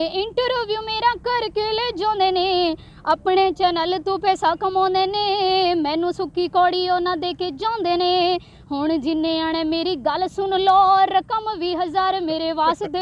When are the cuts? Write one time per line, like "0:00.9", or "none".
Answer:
none